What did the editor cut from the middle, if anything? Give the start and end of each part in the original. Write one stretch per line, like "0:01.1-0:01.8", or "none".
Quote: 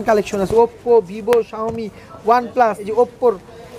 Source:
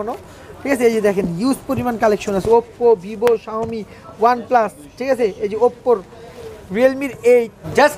0:04.8-0:05.5